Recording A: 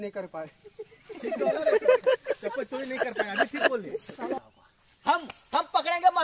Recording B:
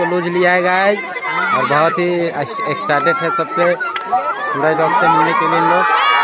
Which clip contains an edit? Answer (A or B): A